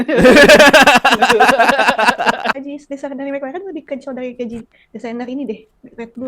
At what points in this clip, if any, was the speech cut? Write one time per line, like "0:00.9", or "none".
0:02.6